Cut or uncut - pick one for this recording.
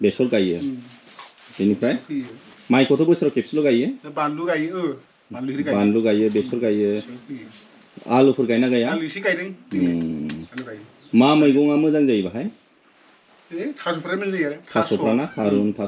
uncut